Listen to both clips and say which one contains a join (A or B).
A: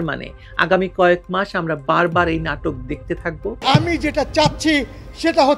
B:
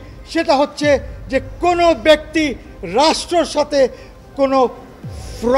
A